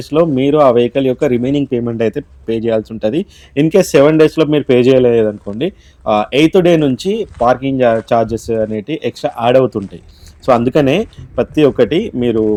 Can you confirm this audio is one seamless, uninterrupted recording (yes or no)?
yes